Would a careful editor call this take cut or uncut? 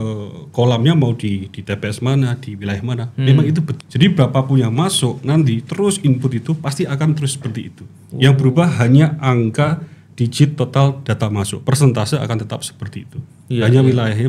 cut